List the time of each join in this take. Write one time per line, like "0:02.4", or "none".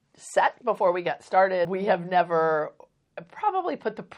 0:01.7